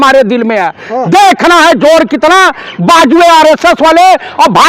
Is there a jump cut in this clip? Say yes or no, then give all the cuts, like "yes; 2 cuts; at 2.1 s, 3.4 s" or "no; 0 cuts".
no; 0 cuts